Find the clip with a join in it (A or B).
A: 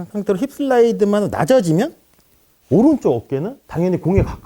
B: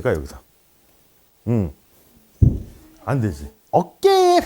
B